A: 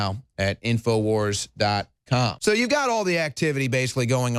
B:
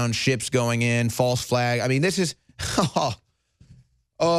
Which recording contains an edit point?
A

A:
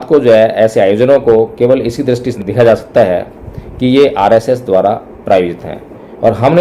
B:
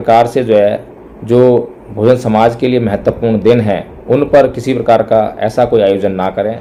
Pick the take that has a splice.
A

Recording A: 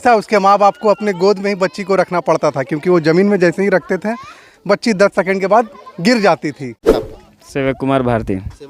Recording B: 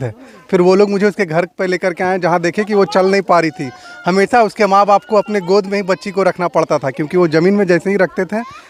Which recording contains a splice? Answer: A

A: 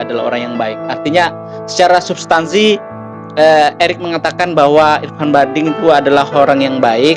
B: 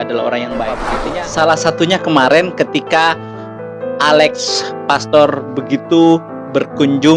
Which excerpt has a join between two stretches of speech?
B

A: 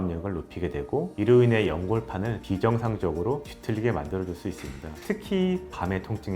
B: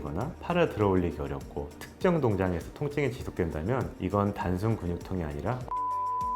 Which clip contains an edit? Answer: A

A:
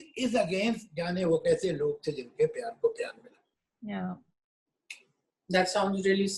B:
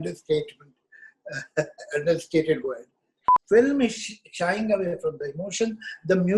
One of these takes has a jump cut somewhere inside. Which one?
B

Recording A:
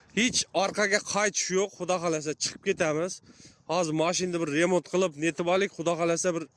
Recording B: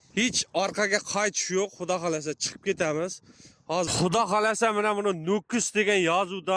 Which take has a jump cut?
B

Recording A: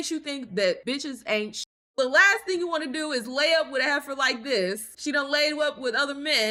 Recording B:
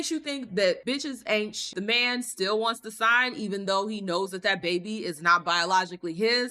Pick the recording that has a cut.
B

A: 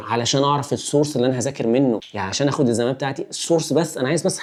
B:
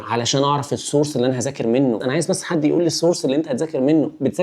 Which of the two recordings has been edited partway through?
B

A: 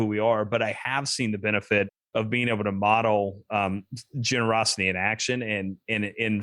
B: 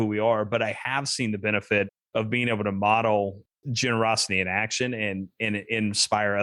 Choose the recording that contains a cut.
B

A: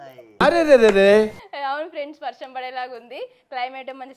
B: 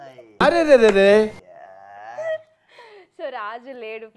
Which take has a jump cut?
A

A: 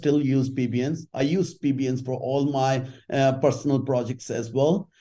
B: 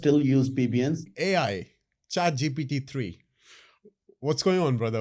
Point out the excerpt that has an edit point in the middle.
B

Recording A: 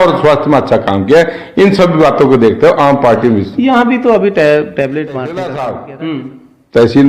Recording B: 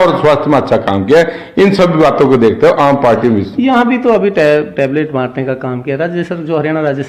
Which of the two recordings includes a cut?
A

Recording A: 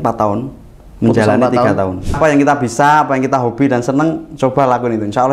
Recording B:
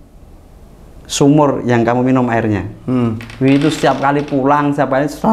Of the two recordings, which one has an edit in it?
A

